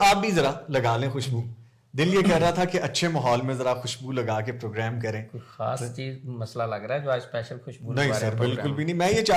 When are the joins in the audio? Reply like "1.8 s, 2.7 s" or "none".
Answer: none